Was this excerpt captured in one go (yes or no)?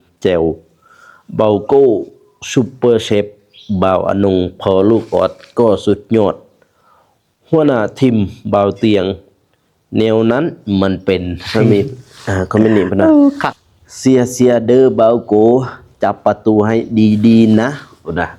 no